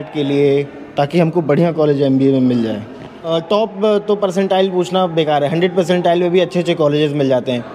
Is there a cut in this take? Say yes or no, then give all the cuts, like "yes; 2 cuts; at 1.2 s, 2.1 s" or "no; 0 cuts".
yes; 1 cut; at 3.3 s